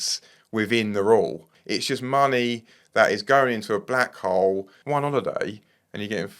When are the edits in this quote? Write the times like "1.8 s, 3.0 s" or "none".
1.5 s, 4.7 s